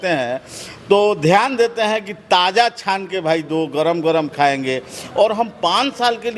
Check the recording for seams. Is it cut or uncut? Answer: uncut